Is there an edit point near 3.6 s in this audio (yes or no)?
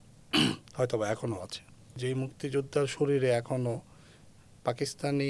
no